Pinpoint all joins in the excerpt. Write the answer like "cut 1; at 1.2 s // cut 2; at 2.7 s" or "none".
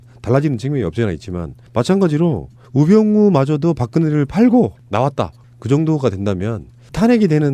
none